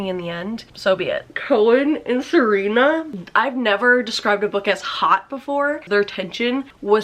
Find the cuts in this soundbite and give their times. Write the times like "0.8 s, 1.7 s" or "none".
1.3 s, 5.9 s